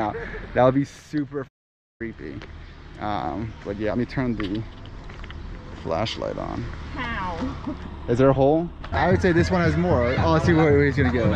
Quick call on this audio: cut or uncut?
cut